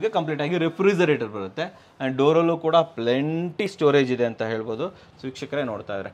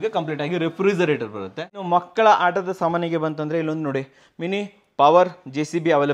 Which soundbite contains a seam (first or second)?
second